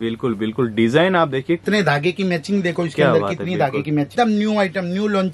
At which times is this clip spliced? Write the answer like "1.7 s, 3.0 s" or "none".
1.6 s, 4.1 s